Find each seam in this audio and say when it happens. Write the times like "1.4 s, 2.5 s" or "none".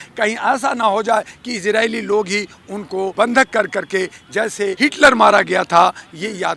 3.1 s, 4.8 s